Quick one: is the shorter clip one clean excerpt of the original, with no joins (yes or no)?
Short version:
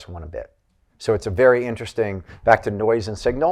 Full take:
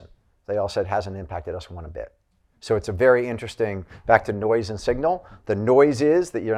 yes